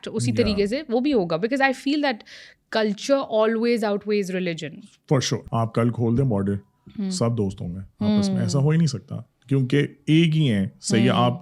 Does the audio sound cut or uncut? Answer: cut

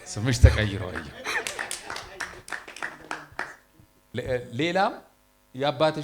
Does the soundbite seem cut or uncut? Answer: cut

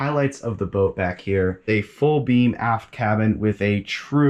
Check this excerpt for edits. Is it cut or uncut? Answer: uncut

